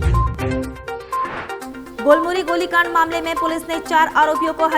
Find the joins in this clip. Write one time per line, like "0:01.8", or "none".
0:01.7